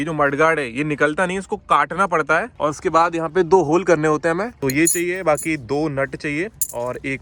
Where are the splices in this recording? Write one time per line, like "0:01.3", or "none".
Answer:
0:02.5
0:04.6